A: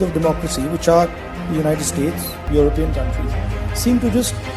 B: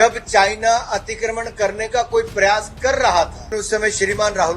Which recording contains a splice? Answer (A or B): B